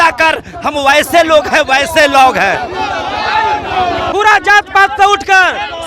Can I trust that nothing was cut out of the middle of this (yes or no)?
no